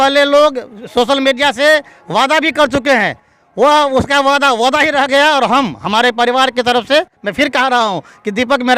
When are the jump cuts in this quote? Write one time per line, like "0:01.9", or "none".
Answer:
none